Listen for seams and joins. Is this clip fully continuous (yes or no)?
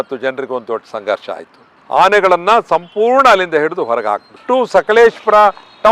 no